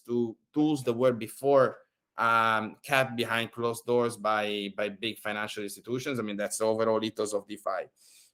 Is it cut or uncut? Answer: uncut